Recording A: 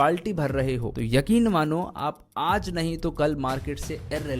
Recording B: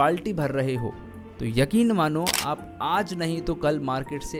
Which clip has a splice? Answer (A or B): A